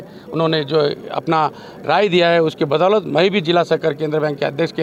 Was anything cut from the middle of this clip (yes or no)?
no